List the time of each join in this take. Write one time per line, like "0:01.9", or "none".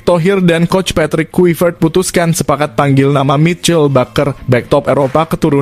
none